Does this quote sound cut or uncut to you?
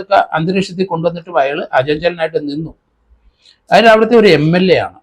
uncut